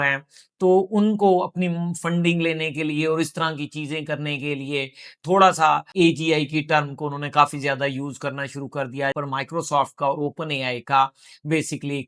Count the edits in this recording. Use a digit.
2